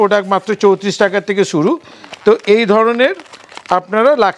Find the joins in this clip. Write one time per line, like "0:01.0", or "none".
none

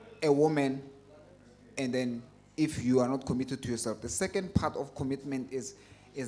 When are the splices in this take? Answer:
none

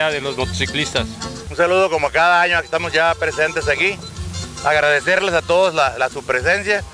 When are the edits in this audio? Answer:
none

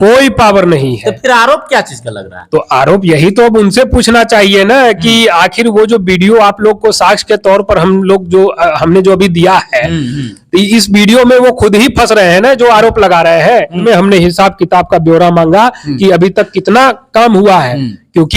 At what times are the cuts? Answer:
0:13.8

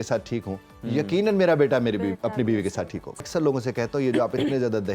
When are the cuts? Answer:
0:03.3

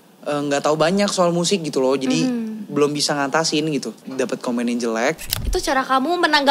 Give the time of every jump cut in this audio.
0:04.1
0:05.4

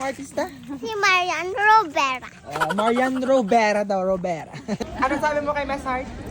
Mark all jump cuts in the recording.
0:04.8

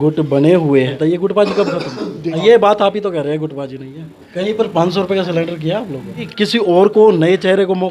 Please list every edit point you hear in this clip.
0:00.9
0:02.2
0:04.2
0:06.3

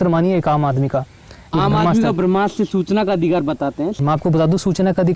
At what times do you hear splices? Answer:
0:04.0

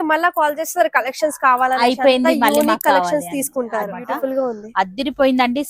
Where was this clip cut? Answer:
0:04.0

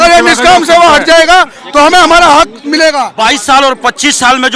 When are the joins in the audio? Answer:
0:03.1

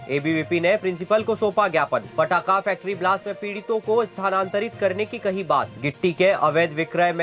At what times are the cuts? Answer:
0:05.9

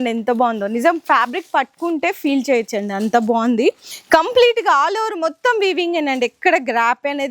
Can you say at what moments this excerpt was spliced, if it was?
0:03.9

